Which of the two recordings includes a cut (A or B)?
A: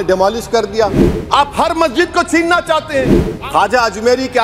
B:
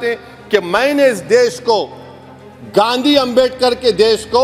A